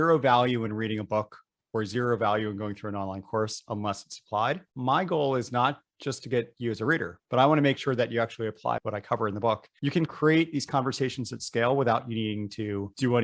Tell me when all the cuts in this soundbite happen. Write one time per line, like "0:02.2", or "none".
0:04.7
0:09.8